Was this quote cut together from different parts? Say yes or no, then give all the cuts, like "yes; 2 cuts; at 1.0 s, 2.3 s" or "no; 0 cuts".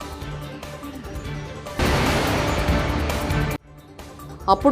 yes; 2 cuts; at 1.8 s, 3.8 s